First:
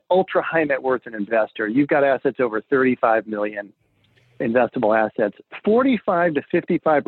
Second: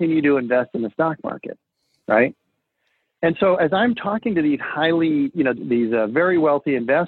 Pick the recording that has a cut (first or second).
first